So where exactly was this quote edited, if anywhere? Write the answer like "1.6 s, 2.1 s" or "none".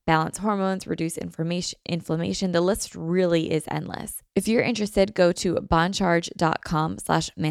4.1 s